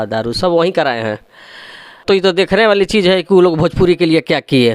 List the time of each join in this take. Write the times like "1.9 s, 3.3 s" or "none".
2.0 s